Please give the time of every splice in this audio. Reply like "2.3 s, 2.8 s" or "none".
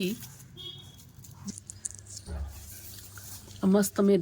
1.5 s